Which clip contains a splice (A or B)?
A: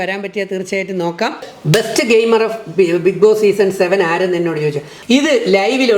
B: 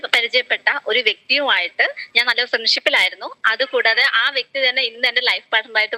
A